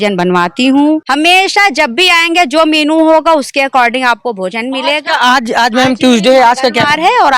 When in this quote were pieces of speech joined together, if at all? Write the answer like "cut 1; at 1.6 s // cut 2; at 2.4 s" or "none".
cut 1; at 1.1 s